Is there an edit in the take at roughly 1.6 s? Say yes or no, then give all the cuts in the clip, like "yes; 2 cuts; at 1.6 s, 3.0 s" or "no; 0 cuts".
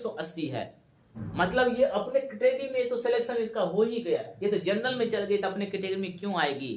no; 0 cuts